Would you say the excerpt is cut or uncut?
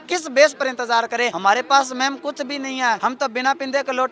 cut